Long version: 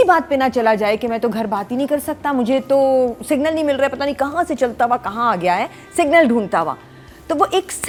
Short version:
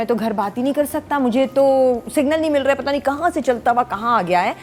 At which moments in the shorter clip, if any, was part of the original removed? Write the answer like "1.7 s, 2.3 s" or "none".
none